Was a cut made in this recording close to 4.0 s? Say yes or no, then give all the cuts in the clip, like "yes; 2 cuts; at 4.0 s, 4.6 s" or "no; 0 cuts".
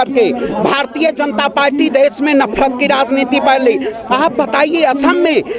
no; 0 cuts